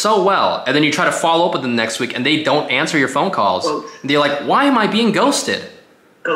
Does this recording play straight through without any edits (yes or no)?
yes